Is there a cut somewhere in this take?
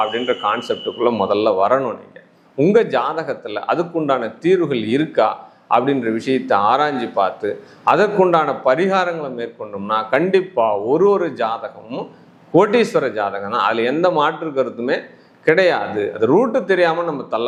no; 0 cuts

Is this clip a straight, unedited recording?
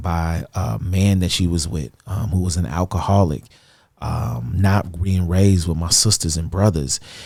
yes; 0 cuts

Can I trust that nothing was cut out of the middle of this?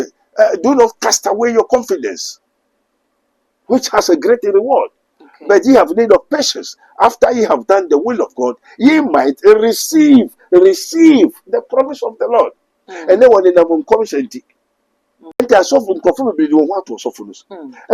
no; 1 cut; at 15.4 s

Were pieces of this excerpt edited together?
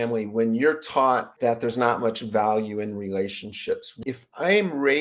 yes; 2 cuts; at 1.3 s, 3.9 s

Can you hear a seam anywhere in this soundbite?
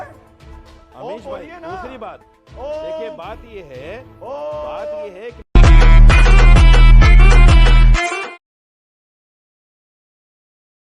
no; 0 cuts

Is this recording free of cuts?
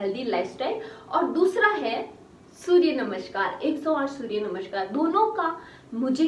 yes; 0 cuts

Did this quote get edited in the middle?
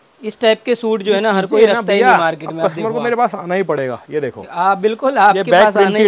no; 0 cuts

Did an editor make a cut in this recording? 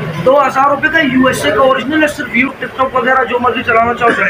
yes; 1 cut; at 2.6 s

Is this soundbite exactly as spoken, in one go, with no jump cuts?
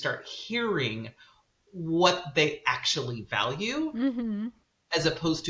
yes; 0 cuts

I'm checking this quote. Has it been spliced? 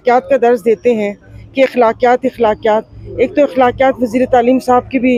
no; 0 cuts

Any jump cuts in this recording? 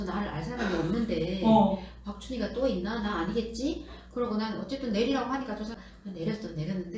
yes; 1 cut; at 5.7 s

